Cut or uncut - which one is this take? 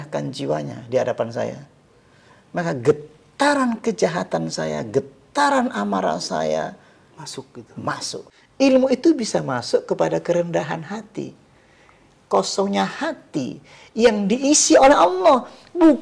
cut